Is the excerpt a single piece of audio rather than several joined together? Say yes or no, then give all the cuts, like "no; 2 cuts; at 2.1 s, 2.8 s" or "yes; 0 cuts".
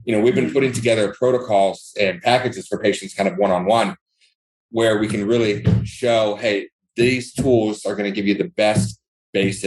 yes; 0 cuts